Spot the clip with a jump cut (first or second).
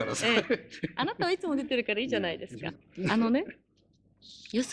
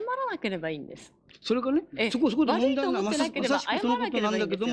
first